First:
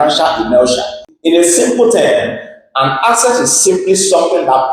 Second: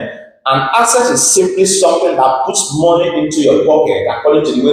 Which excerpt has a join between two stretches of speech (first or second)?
first